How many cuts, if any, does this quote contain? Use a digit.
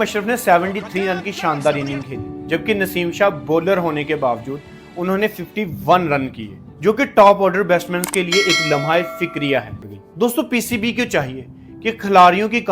1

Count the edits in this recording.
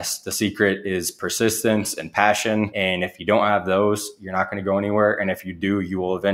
1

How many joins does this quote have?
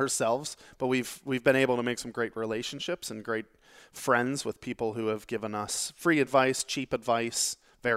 0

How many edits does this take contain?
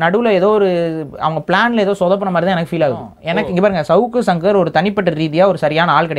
1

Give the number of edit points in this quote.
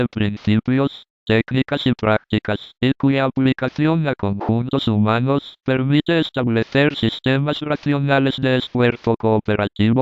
0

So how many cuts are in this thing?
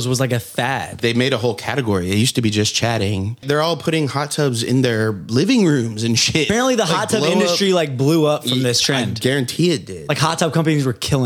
3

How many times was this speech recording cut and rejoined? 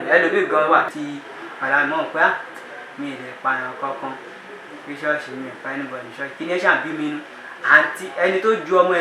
1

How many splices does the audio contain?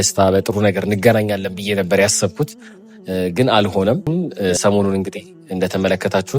1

